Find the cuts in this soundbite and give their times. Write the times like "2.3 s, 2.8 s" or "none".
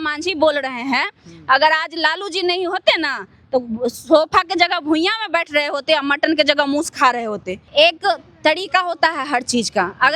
7.5 s

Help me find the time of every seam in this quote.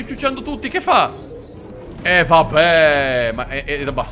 none

